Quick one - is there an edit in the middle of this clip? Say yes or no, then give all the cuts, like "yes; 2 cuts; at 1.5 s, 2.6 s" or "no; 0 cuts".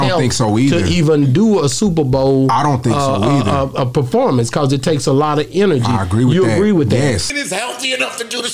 no; 0 cuts